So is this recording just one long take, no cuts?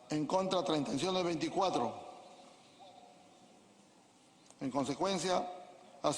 no; 1 cut; at 0.9 s

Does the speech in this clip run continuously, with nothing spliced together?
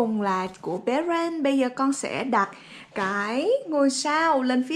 yes; 0 cuts

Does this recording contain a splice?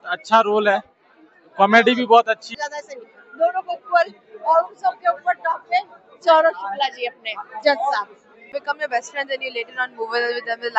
yes; 2 cuts; at 2.5 s, 8.5 s

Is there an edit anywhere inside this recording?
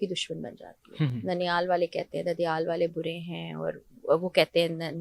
no; 0 cuts

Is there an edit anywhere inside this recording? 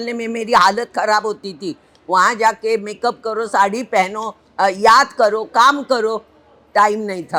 no; 0 cuts

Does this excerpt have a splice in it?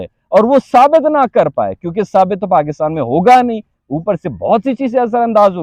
no; 0 cuts

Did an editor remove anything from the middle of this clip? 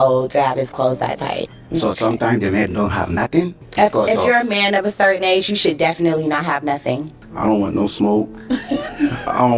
yes; 3 cuts; at 1.5 s, 3.6 s, 7.2 s

